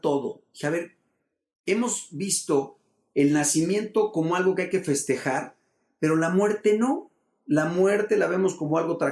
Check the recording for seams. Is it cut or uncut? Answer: uncut